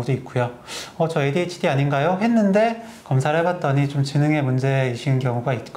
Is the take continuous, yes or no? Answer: yes